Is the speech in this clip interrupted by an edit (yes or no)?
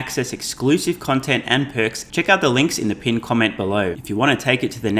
yes